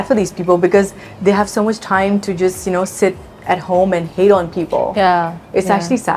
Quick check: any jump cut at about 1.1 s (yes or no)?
no